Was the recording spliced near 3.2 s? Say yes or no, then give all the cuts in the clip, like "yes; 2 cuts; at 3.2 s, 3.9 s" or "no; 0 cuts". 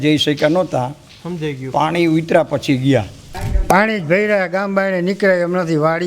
yes; 1 cut; at 3.2 s